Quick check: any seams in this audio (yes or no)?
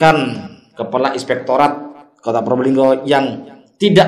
no